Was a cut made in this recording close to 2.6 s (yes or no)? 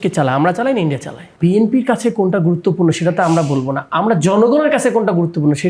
no